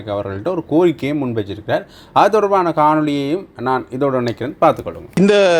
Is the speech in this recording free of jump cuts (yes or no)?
yes